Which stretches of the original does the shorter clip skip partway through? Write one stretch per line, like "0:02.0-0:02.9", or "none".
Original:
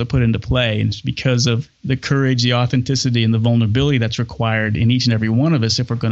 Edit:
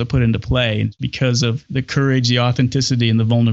0:01.2-0:01.4